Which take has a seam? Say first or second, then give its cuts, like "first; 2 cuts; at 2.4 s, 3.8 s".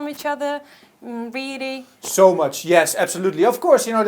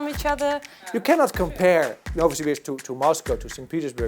second; 1 cut; at 1.0 s